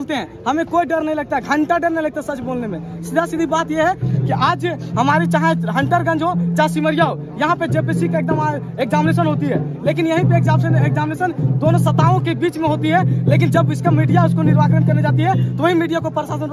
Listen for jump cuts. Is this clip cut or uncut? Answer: uncut